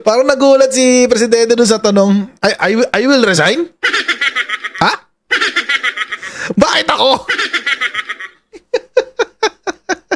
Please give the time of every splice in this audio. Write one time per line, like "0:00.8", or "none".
none